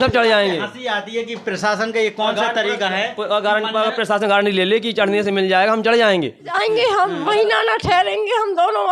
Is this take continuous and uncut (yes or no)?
no